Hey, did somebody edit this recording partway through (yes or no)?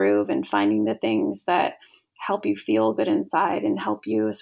no